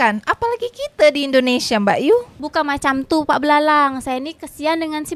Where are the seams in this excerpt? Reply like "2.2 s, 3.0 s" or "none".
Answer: none